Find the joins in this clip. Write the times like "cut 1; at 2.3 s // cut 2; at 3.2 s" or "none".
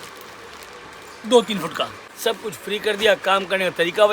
cut 1; at 2.0 s